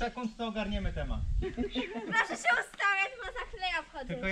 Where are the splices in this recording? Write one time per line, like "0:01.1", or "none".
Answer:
0:01.3